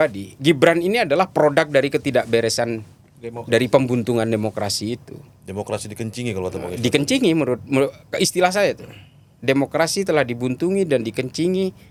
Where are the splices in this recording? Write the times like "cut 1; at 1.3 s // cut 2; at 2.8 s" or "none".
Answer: none